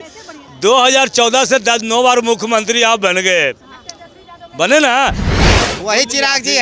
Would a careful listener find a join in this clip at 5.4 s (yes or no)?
yes